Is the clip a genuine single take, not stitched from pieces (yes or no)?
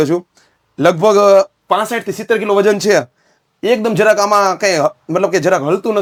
yes